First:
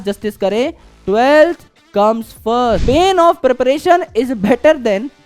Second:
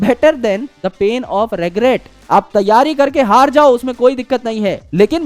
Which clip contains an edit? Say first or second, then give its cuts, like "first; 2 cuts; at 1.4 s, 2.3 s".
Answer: first; 1 cut; at 2.8 s